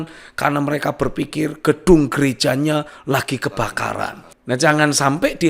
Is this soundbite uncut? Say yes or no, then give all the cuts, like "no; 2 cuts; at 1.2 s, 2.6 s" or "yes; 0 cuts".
no; 1 cut; at 4.3 s